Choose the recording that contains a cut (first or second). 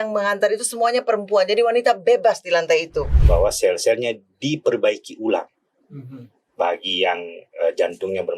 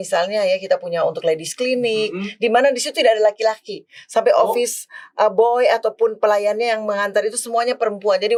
first